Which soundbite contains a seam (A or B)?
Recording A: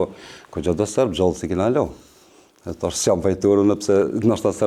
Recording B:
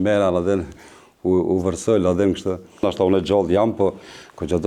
B